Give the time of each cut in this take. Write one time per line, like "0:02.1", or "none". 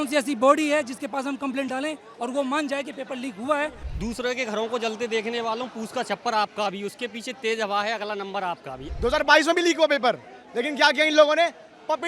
0:03.9
0:08.9